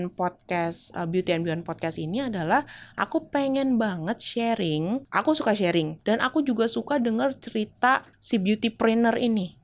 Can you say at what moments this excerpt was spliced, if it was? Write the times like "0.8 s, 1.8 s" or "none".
5.1 s, 5.9 s, 8.1 s